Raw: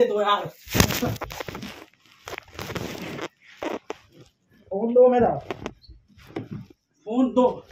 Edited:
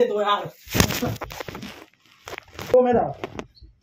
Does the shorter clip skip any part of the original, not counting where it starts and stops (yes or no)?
yes